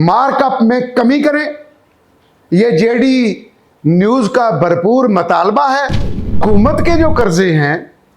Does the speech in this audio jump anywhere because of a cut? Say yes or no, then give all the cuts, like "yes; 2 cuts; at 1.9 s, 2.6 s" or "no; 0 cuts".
yes; 1 cut; at 6.4 s